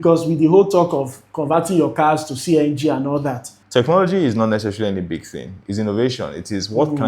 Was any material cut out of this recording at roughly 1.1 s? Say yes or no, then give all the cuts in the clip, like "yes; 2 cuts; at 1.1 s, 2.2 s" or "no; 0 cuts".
no; 1 cut; at 3.5 s